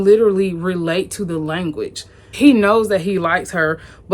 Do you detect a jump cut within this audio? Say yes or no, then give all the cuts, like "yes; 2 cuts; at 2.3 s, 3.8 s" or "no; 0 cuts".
yes; 1 cut; at 2.2 s